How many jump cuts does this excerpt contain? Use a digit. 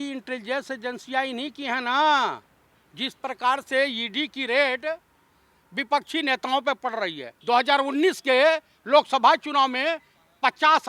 1